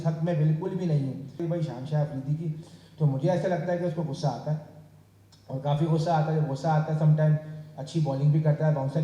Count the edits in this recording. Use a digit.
1